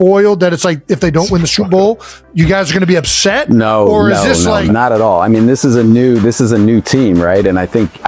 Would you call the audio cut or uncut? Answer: cut